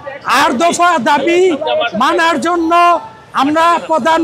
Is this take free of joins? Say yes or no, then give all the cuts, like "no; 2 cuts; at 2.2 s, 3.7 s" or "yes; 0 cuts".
yes; 0 cuts